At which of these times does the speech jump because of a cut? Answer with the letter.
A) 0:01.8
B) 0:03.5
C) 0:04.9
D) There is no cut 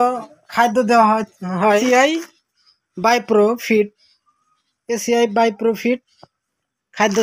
A